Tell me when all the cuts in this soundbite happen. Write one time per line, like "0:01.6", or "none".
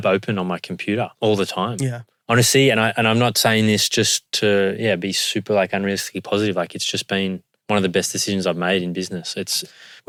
none